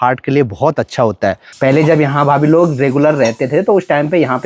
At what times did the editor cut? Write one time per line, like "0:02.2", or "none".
0:01.5